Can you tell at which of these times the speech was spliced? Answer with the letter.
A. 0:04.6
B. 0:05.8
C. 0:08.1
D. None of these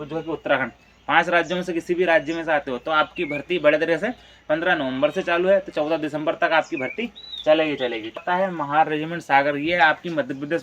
C